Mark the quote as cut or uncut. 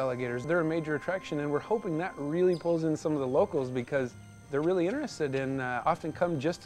uncut